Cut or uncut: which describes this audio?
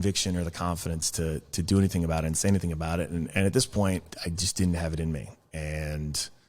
cut